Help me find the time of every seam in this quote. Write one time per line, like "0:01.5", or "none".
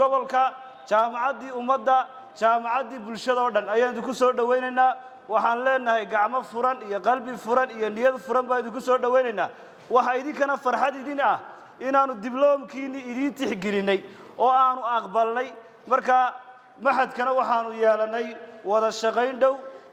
none

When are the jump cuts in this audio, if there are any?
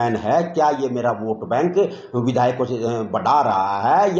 none

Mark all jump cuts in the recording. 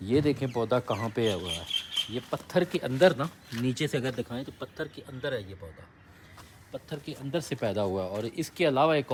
none

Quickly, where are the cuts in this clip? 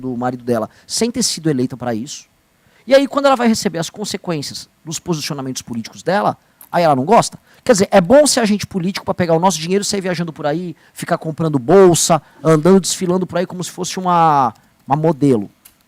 none

